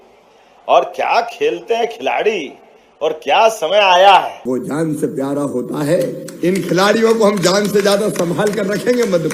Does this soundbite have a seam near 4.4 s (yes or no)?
yes